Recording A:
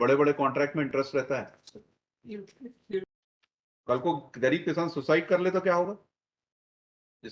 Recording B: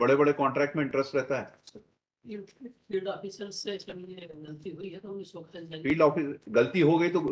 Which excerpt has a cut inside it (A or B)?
A